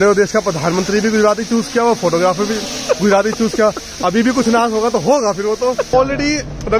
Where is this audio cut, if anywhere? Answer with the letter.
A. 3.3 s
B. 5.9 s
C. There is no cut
B